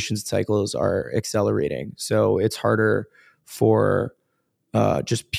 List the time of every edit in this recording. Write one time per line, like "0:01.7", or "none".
none